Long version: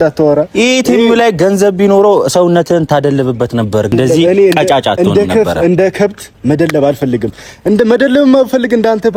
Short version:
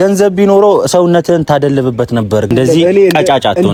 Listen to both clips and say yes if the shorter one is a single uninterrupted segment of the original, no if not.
yes